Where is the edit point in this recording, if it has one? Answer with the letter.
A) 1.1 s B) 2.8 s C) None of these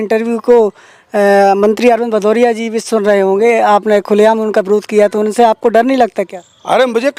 C